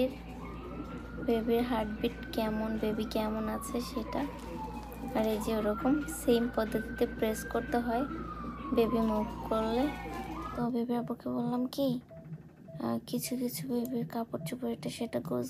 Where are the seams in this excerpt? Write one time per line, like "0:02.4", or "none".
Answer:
0:10.4